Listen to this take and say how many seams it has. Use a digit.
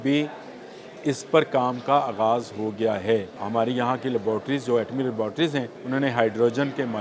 2